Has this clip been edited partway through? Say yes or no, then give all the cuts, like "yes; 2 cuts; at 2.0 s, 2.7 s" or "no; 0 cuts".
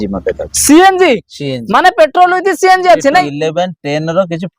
yes; 1 cut; at 3.3 s